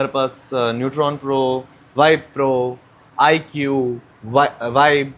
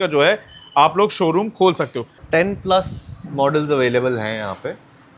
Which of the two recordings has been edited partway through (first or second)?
second